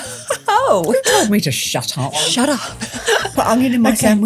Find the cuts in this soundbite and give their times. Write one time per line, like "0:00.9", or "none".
0:02.1
0:03.3